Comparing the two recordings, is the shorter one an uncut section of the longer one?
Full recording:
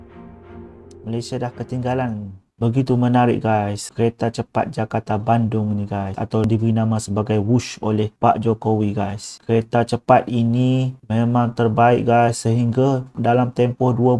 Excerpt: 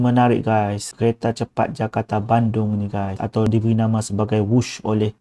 yes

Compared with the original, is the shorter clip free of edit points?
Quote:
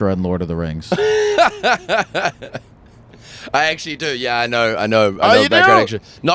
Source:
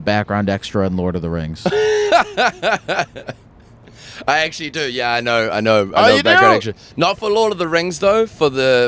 yes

